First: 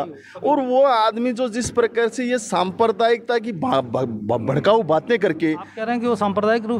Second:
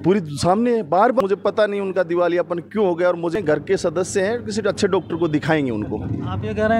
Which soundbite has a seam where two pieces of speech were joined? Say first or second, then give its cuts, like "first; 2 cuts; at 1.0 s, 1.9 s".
second; 2 cuts; at 1.2 s, 3.3 s